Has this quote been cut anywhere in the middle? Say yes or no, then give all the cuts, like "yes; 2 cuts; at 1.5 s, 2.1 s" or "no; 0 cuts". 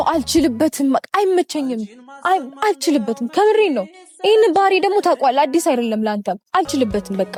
no; 0 cuts